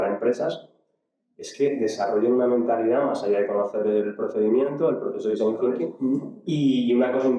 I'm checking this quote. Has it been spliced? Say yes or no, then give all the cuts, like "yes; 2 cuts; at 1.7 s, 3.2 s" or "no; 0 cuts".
yes; 1 cut; at 5.9 s